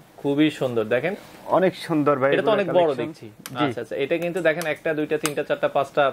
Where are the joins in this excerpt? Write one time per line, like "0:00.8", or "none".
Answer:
none